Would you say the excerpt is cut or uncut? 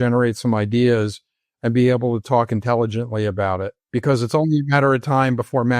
cut